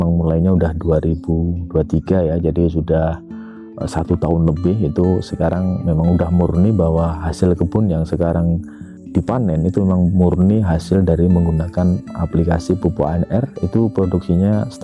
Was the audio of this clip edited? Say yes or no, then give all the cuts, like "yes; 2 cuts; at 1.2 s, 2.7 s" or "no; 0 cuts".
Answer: no; 0 cuts